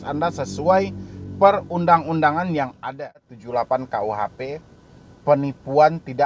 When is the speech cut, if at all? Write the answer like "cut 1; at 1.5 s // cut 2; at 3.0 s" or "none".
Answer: cut 1; at 3.4 s